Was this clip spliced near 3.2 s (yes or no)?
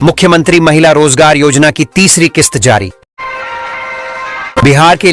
yes